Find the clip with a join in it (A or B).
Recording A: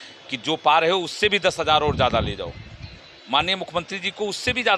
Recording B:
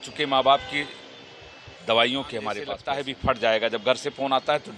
B